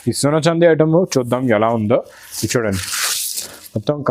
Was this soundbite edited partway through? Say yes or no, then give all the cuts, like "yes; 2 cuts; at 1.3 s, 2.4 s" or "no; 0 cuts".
no; 0 cuts